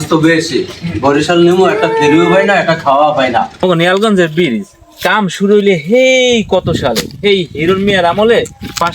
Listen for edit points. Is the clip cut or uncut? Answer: cut